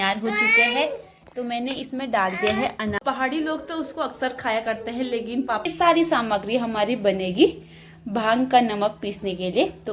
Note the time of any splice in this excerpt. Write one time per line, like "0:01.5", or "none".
0:03.0
0:05.7